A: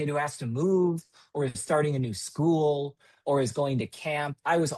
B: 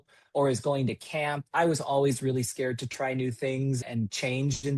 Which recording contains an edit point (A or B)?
B